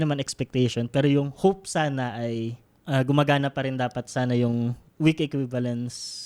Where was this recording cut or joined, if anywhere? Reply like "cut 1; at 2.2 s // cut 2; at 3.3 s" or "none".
cut 1; at 2.7 s // cut 2; at 4.8 s